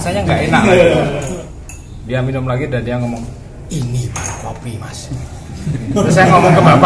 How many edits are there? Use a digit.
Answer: 1